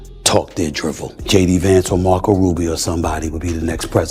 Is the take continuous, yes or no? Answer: no